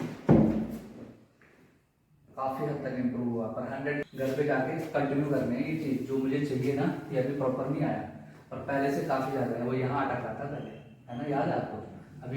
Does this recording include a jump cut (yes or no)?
yes